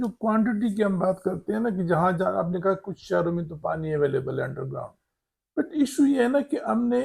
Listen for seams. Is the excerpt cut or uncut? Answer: uncut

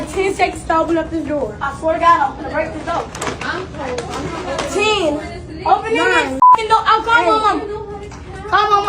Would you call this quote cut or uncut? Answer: cut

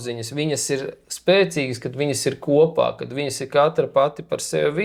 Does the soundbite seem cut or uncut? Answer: uncut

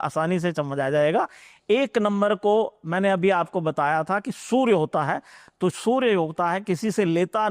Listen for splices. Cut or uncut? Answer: uncut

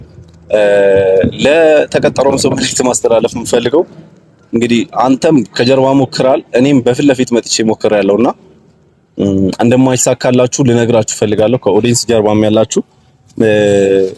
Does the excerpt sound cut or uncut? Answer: uncut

